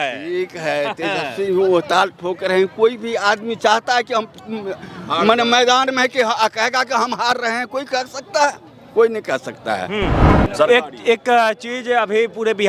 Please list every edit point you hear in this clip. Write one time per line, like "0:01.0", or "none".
0:10.3